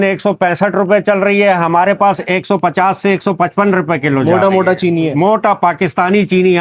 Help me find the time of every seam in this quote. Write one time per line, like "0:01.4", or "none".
none